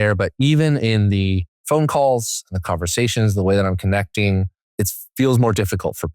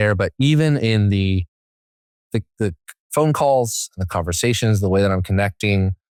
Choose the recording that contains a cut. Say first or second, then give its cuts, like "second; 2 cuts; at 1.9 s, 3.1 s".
first; 2 cuts; at 1.5 s, 4.6 s